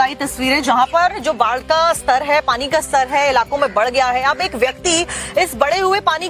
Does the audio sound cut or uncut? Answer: cut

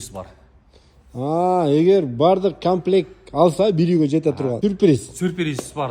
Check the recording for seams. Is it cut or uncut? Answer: cut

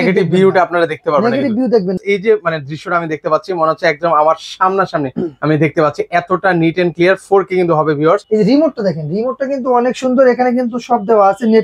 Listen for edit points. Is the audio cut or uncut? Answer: cut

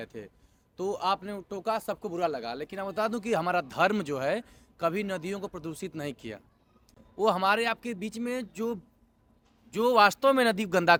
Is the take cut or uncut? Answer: uncut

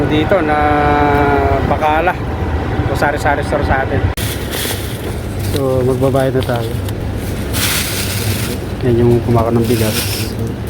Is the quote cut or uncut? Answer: cut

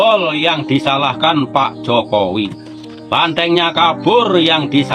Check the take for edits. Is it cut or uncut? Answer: uncut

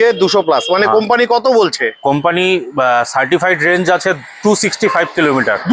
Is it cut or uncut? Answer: uncut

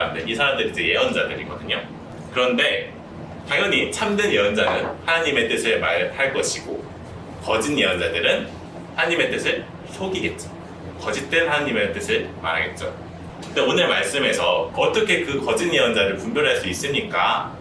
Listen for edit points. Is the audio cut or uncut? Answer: uncut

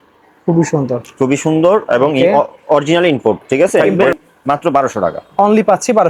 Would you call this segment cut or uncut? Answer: cut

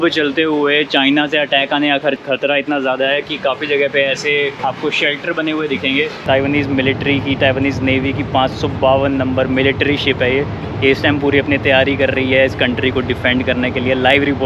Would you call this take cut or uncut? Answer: cut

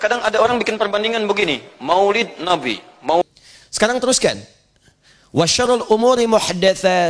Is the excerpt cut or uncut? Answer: cut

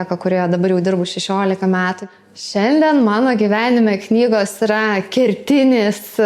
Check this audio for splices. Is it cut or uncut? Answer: cut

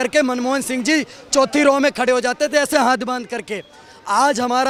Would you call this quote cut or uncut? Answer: uncut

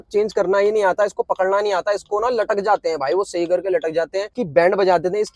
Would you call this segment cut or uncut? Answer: cut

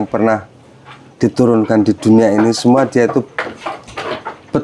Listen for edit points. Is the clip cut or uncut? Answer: uncut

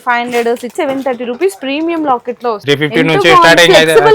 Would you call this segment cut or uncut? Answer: cut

